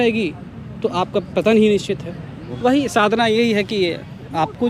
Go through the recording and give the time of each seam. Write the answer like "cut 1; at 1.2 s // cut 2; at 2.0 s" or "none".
cut 1; at 2.5 s